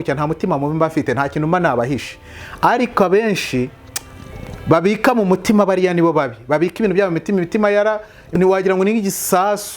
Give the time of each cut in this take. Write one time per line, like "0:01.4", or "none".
0:08.3